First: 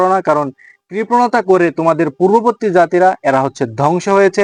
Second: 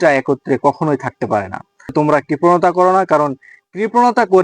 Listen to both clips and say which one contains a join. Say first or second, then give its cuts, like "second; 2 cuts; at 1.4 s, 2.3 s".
second; 1 cut; at 1.9 s